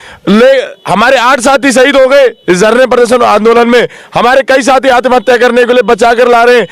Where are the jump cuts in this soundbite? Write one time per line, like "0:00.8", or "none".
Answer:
none